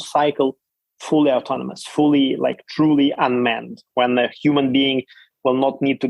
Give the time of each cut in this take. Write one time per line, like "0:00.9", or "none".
none